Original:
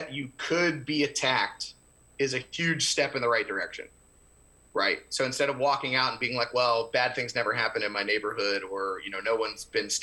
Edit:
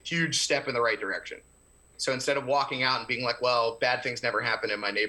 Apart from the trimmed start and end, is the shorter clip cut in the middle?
yes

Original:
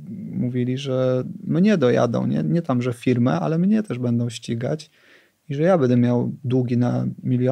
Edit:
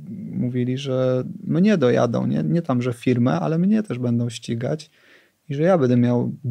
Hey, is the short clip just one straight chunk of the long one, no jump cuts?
yes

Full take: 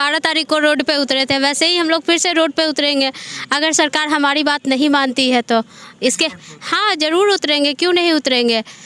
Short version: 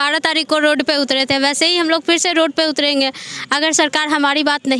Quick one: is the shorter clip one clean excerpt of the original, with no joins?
yes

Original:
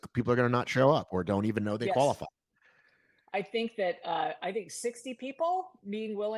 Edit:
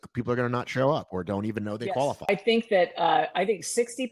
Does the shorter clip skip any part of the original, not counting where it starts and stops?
yes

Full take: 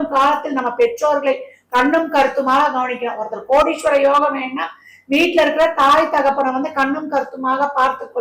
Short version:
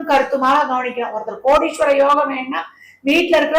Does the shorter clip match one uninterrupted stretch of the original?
yes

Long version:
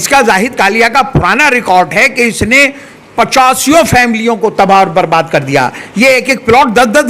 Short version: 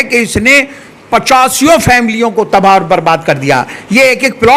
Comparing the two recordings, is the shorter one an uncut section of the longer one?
yes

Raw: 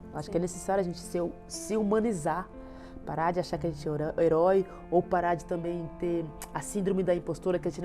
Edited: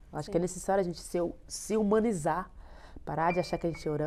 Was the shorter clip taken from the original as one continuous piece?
yes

